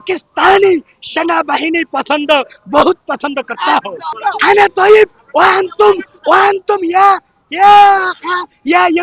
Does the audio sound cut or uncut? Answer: uncut